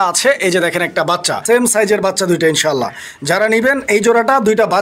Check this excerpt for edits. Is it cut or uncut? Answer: cut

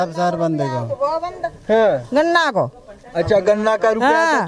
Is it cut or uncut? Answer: uncut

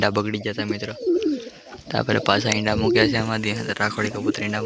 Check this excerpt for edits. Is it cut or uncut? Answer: uncut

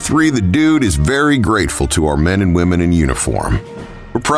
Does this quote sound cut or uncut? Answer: uncut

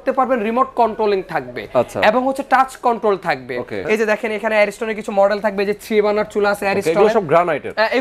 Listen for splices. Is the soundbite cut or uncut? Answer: cut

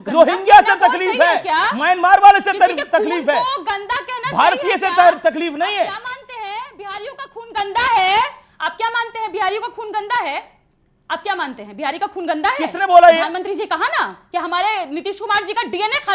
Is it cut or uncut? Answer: uncut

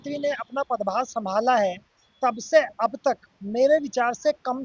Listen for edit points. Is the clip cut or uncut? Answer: uncut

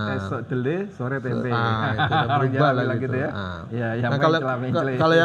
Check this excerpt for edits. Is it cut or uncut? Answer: uncut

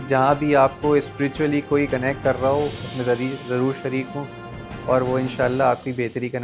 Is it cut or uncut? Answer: uncut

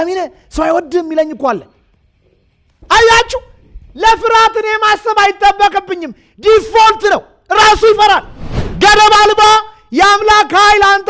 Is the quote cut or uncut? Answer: cut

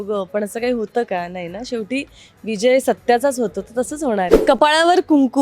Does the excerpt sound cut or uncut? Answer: cut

